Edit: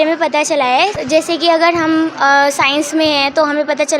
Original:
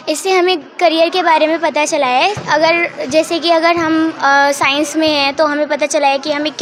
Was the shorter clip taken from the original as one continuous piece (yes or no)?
no